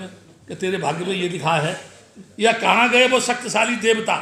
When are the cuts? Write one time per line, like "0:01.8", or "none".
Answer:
none